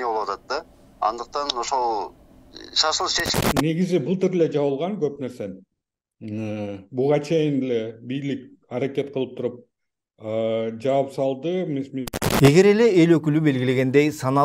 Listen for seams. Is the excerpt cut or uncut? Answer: cut